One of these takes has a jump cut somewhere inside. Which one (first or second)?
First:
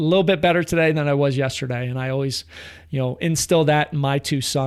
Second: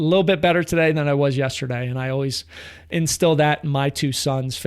second